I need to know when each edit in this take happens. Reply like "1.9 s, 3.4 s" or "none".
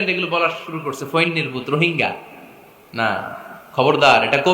3.5 s